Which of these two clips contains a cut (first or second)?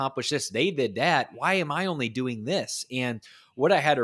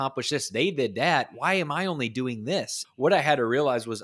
second